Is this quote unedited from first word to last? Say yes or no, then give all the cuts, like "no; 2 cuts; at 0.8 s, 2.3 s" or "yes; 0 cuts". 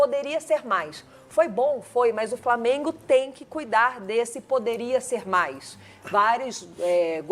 yes; 0 cuts